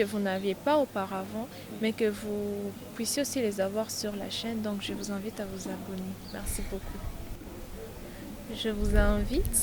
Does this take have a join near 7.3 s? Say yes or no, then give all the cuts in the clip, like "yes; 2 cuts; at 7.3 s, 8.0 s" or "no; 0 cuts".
yes; 1 cut; at 7.3 s